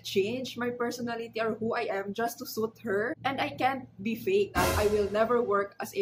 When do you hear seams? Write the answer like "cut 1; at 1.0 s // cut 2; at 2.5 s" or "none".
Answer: cut 1; at 4.5 s